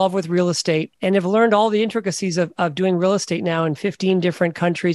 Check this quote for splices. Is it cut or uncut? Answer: cut